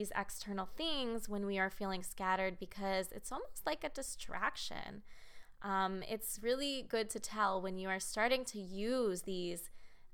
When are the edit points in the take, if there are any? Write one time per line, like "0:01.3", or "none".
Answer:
none